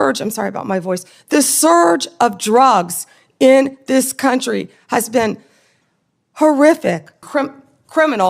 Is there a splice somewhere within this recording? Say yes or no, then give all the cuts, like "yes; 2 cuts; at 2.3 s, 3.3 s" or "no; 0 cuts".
yes; 1 cut; at 7.2 s